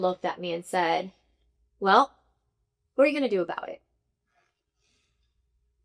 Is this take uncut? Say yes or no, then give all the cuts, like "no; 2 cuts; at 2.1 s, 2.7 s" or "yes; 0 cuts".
yes; 0 cuts